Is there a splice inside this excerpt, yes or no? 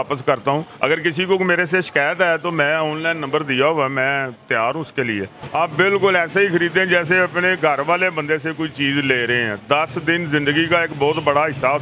yes